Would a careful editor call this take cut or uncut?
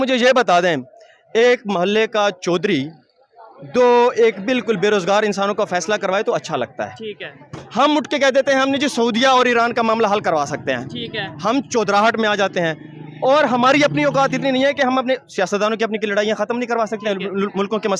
uncut